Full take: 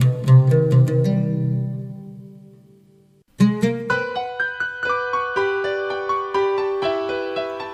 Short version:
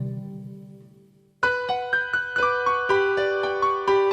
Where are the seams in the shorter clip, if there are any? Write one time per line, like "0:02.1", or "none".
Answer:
0:01.4